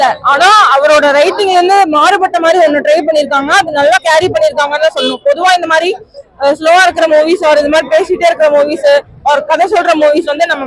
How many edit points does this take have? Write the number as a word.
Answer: zero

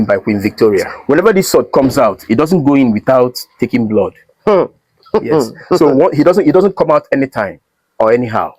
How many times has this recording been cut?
one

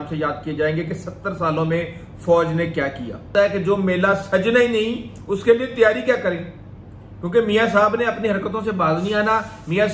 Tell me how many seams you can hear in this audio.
one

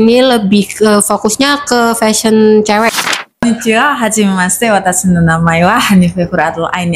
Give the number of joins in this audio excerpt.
one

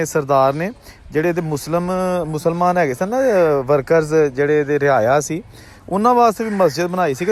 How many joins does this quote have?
zero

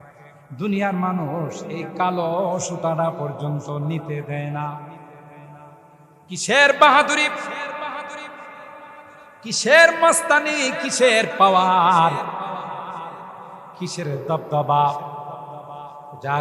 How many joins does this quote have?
one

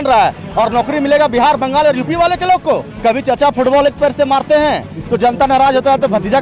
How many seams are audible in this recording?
one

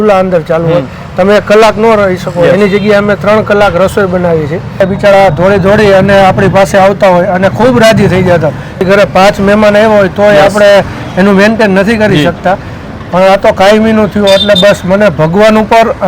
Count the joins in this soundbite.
two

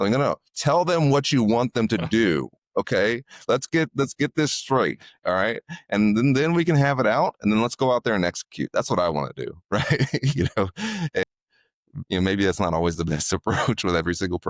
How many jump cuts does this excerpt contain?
one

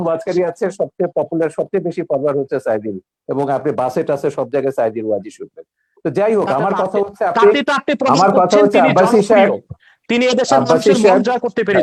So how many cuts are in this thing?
zero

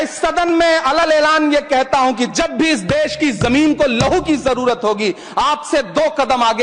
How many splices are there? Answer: zero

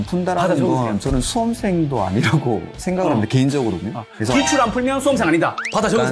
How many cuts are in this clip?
zero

